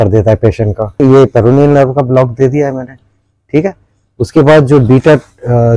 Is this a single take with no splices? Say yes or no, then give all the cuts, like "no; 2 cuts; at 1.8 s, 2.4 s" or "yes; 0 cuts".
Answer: no; 1 cut; at 1.0 s